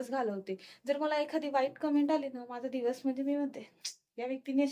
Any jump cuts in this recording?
no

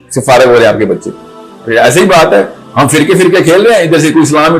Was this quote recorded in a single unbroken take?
no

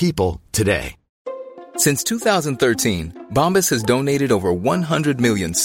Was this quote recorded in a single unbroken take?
yes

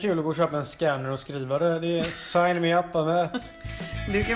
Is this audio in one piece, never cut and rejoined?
yes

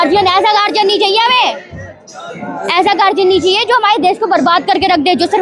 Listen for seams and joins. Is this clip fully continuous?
yes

